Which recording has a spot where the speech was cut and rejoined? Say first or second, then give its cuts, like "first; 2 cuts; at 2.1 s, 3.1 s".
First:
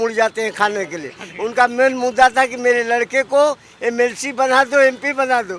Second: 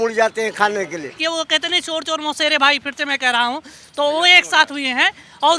second; 1 cut; at 1.2 s